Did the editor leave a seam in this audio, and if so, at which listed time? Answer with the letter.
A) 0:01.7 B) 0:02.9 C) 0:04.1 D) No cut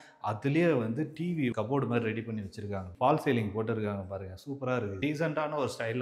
B